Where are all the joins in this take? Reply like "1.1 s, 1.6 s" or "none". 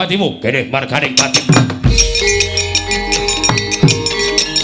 none